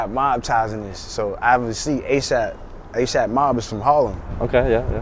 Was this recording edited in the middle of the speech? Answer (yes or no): no